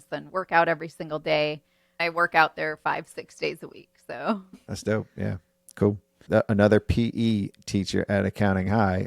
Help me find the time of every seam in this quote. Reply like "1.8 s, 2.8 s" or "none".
2.0 s, 4.5 s, 6.2 s